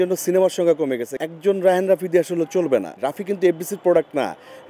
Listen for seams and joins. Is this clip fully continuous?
no; 2 cuts; at 1.1 s, 3.1 s

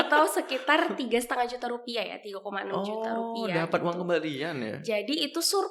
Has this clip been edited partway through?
no; 0 cuts

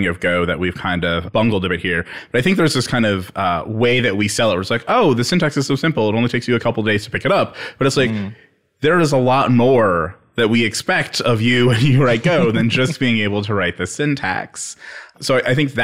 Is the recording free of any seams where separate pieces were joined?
yes; 0 cuts

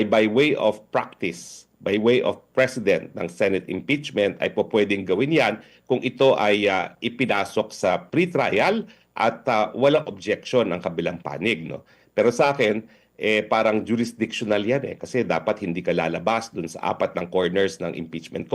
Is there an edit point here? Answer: no; 0 cuts

